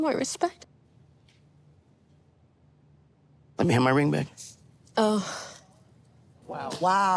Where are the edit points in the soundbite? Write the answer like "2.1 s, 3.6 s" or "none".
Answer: none